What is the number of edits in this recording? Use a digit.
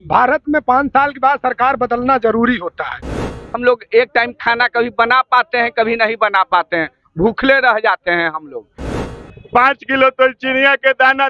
2